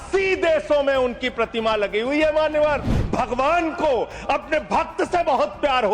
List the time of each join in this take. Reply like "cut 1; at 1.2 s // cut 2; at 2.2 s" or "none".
cut 1; at 3.0 s